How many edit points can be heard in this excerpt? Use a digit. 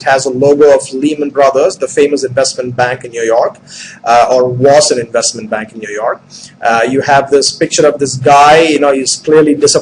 1